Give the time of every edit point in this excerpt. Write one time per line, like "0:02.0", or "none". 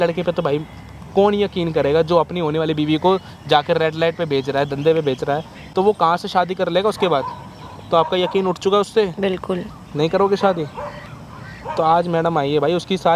none